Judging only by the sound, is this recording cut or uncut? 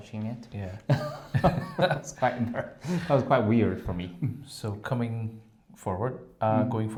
uncut